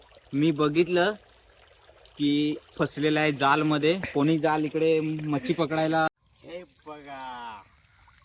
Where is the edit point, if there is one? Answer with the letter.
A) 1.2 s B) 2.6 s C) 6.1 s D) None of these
C